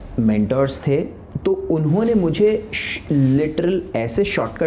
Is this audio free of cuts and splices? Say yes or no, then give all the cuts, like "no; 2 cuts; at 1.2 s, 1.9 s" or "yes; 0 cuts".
no; 1 cut; at 1.2 s